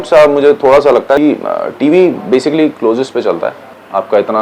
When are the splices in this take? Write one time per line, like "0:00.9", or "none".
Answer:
0:01.2